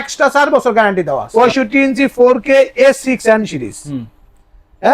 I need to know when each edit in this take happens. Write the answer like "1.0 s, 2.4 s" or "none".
1.2 s